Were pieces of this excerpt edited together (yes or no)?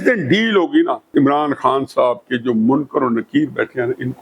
yes